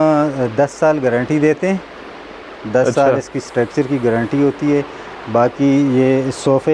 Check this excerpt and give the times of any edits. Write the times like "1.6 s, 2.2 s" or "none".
none